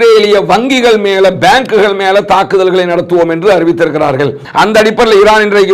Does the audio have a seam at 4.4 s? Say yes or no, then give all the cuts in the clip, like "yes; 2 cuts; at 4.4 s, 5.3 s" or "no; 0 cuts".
yes; 1 cut; at 4.4 s